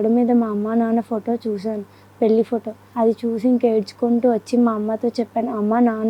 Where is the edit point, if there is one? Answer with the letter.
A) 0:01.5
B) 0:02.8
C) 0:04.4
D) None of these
B